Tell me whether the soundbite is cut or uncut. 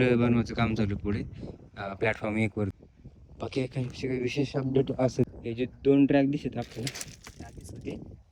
cut